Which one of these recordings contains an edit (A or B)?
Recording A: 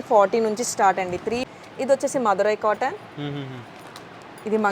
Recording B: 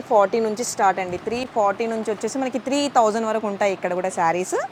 A